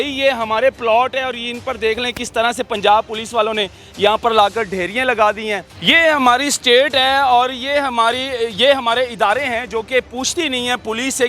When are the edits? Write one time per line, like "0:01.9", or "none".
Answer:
0:05.7